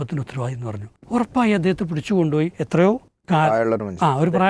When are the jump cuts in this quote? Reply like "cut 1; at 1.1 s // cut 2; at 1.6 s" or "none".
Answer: cut 1; at 0.9 s // cut 2; at 2.8 s